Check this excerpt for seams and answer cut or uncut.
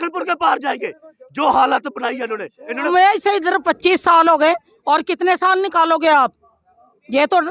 cut